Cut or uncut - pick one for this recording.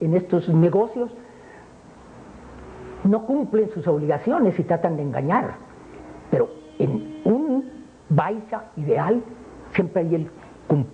cut